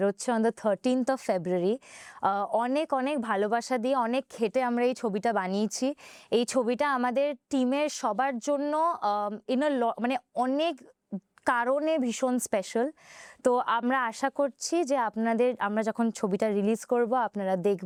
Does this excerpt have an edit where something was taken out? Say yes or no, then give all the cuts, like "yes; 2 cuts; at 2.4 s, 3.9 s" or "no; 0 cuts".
no; 0 cuts